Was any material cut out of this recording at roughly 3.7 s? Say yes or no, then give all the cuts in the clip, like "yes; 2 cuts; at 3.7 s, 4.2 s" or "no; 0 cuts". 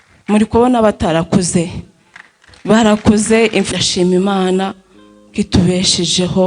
yes; 1 cut; at 3.7 s